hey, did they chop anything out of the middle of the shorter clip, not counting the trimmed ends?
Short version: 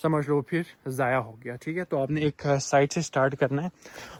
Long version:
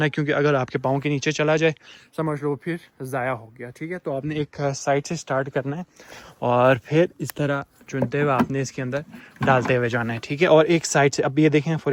no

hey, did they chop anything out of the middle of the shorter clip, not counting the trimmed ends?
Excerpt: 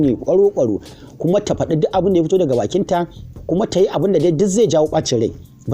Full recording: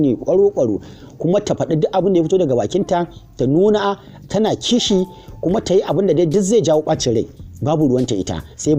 yes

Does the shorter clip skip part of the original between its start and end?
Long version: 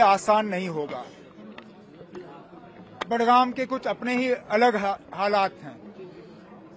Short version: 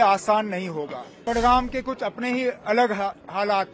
yes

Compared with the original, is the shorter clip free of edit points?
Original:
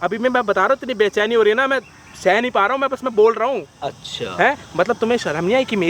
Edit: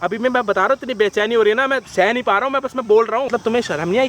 no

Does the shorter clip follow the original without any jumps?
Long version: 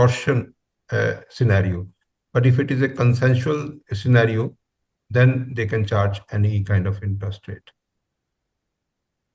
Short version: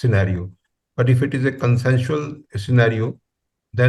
yes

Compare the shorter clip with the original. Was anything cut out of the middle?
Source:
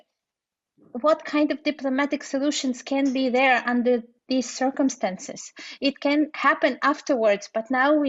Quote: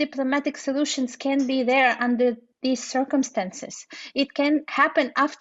no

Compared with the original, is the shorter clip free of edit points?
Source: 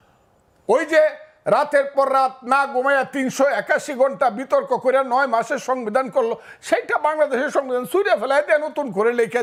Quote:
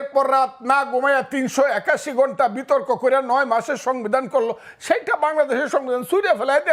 yes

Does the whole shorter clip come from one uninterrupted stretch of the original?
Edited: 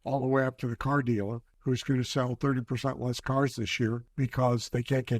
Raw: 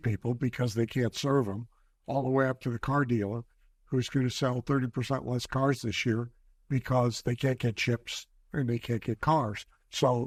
no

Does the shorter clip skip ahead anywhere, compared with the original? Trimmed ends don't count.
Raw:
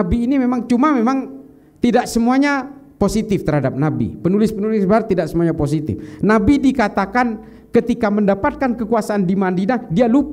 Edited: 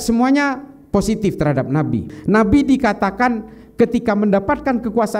yes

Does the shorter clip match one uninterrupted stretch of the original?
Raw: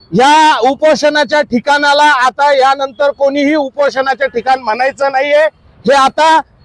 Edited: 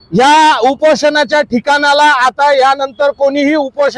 yes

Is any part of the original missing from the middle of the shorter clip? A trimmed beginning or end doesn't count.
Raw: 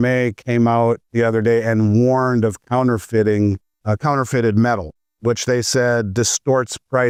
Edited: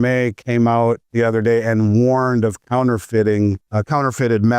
yes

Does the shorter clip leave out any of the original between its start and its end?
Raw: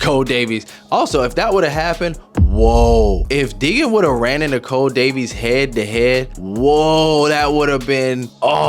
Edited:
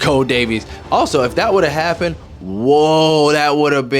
yes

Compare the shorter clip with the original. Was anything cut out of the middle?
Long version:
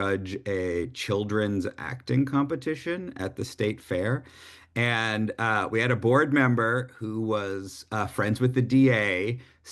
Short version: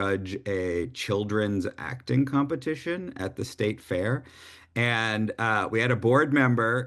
no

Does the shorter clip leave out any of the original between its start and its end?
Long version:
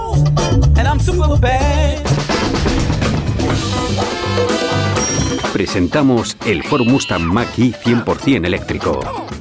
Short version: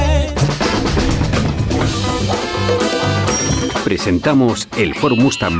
no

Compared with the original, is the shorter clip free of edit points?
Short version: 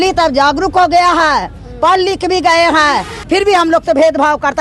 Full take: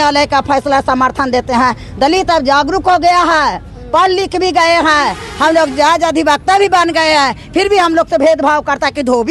no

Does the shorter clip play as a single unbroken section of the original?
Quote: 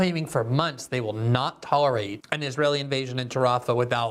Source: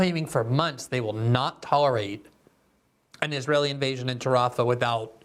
no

